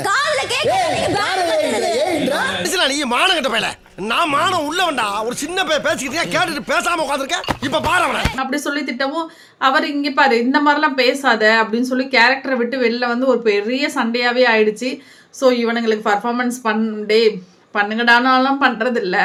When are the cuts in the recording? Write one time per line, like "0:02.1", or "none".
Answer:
none